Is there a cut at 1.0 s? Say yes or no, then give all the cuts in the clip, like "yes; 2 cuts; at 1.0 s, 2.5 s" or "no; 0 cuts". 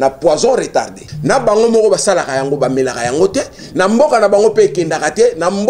yes; 1 cut; at 1.0 s